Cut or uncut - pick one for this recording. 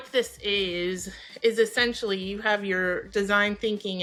uncut